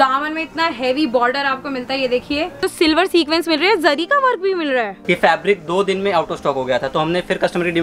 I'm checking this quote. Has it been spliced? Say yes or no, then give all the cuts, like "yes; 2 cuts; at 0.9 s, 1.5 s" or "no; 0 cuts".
yes; 2 cuts; at 2.5 s, 5.0 s